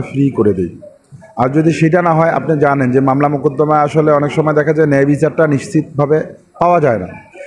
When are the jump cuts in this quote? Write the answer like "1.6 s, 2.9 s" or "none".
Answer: none